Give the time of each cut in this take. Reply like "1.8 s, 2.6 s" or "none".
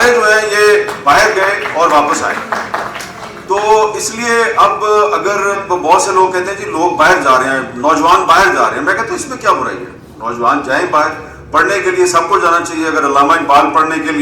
5.5 s

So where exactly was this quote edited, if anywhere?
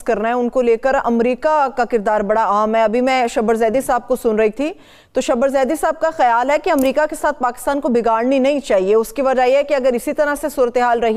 none

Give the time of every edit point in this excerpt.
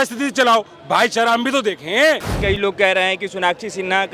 2.3 s

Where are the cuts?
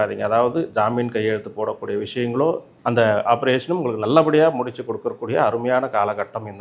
2.7 s

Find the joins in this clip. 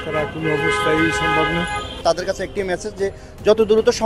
2.0 s

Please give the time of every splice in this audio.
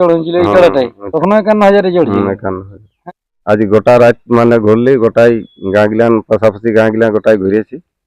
1.0 s, 2.9 s

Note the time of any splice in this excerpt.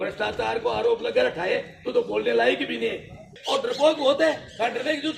3.3 s

